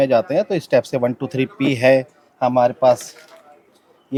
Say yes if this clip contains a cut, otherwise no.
no